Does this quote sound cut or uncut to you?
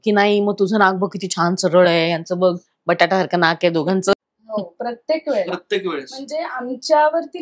cut